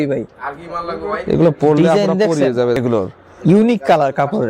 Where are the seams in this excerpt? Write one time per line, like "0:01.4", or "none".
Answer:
0:02.8